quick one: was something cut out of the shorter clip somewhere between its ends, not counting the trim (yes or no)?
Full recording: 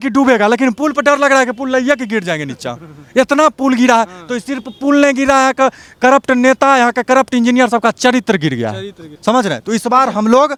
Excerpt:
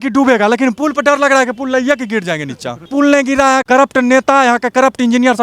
yes